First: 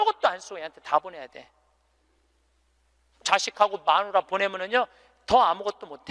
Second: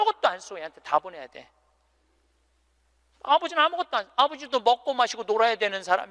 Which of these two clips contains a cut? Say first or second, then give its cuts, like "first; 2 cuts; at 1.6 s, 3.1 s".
first; 1 cut; at 3.1 s